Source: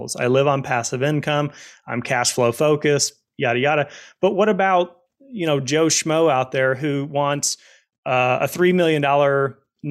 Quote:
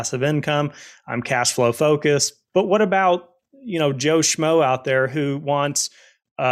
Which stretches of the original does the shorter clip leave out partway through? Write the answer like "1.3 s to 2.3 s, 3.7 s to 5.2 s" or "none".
3.2 s to 4.0 s